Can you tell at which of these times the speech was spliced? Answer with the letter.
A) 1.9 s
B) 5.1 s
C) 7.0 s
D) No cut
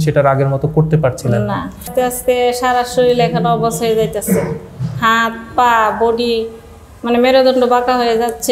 A